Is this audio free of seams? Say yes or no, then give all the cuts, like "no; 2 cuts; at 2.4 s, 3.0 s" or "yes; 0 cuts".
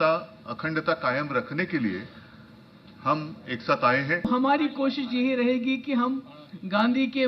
no; 1 cut; at 4.3 s